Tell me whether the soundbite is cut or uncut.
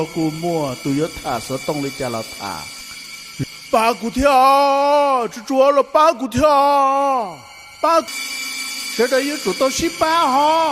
cut